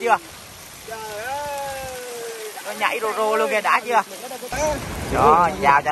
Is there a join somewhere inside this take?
yes; 1 cut; at 4.5 s

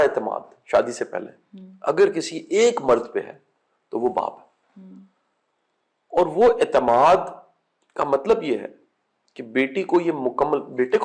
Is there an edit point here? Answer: no; 0 cuts

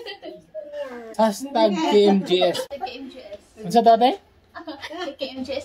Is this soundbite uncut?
no; 2 cuts; at 1.0 s, 2.6 s

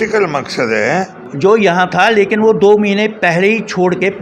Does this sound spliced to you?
yes; 1 cut; at 1.2 s

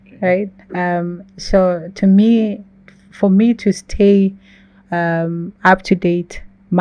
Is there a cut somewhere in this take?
no; 0 cuts

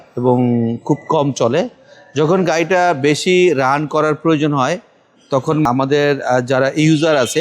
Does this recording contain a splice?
yes; 1 cut; at 5.7 s

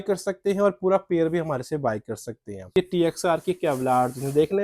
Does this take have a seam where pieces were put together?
no; 0 cuts

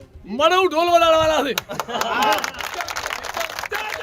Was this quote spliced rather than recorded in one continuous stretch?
no; 0 cuts

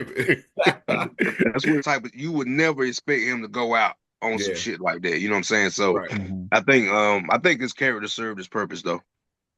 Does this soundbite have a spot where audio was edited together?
yes; 1 cut; at 1.8 s

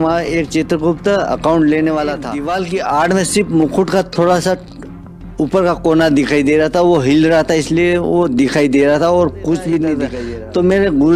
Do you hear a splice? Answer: yes; 2 cuts; at 2.4 s, 10.1 s

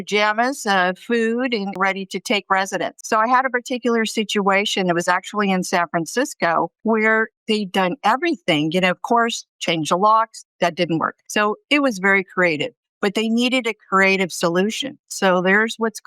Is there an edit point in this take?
yes; 3 cuts; at 3.0 s, 6.8 s, 11.2 s

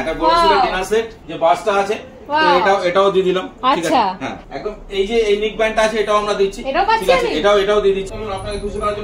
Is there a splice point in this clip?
yes; 3 cuts; at 1.2 s, 4.3 s, 8.1 s

